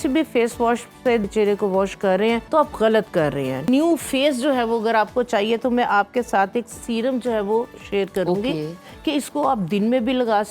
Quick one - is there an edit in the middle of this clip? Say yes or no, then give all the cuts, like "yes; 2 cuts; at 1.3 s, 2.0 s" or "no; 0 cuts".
yes; 3 cuts; at 1.3 s, 2.4 s, 3.7 s